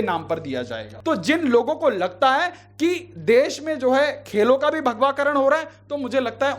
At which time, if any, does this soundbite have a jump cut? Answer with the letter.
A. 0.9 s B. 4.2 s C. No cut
A